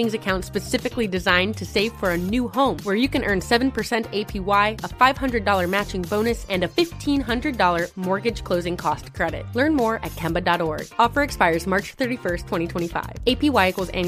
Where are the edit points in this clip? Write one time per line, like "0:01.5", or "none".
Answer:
none

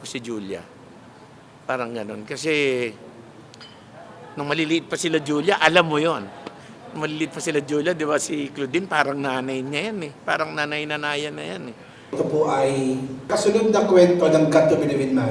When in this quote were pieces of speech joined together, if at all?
0:12.0
0:13.3

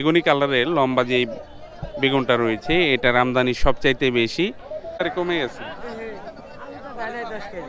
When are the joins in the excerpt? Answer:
0:05.0

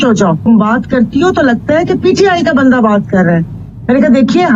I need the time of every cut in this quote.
none

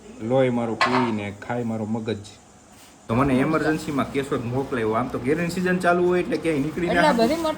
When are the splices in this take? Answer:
0:03.0

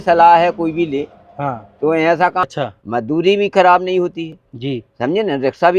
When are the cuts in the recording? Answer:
0:02.4

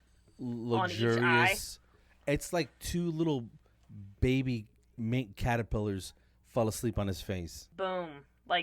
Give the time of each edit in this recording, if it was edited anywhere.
0:07.6

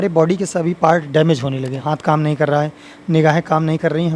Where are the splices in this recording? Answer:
0:01.8

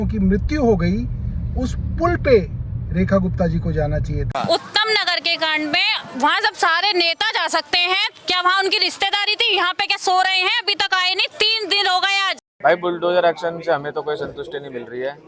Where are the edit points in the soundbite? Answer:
0:04.2
0:12.4

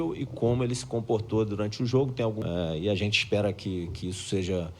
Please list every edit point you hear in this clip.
0:02.4

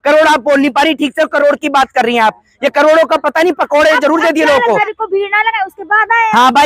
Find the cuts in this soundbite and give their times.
0:04.8

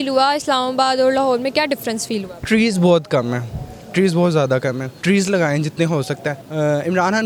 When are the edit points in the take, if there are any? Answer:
0:04.9
0:06.4

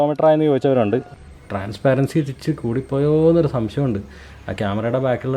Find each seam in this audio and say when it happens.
0:01.1

